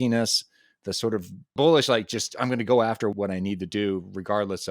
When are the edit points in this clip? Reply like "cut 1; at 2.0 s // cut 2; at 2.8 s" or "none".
cut 1; at 3.1 s